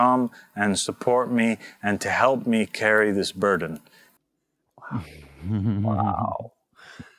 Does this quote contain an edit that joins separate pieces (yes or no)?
no